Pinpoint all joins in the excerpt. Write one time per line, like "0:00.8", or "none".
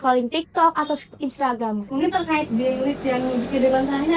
0:01.9

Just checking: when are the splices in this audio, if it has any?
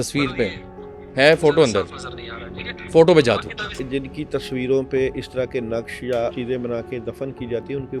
0:03.8
0:06.3

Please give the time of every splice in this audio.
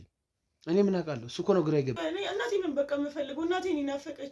0:02.0

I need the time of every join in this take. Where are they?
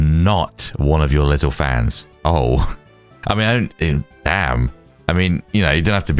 0:02.0

